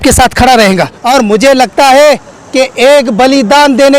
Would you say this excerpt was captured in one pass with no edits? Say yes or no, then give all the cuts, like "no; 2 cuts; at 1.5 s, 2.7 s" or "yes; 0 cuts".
no; 1 cut; at 0.9 s